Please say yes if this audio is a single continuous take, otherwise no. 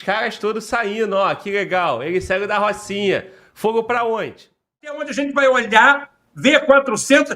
no